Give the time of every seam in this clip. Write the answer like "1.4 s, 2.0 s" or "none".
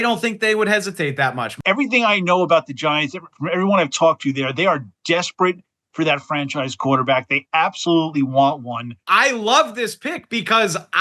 1.5 s, 8.9 s